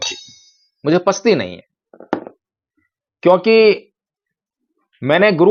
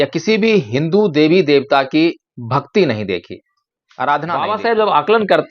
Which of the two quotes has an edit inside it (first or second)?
second